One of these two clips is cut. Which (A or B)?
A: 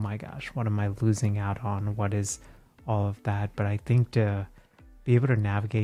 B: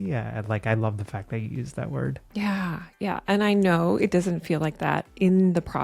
B